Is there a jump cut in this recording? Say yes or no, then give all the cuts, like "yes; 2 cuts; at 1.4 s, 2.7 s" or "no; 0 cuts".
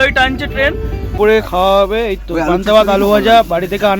yes; 1 cut; at 1.1 s